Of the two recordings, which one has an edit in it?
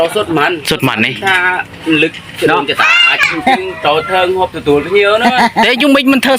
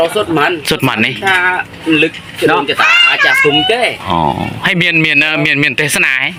first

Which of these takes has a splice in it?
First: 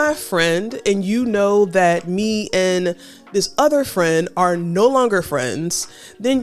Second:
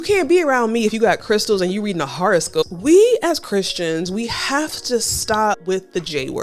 second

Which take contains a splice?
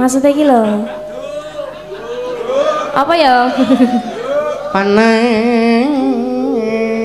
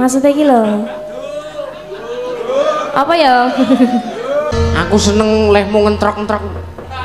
second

